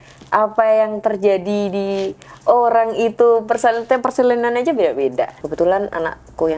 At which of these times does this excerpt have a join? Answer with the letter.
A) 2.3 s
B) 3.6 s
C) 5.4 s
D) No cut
C